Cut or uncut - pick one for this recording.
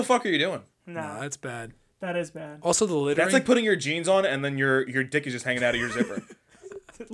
uncut